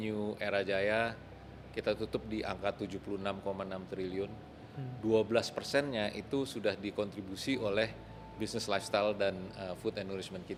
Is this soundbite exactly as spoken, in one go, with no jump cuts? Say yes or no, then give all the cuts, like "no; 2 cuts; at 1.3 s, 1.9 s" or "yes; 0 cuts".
yes; 0 cuts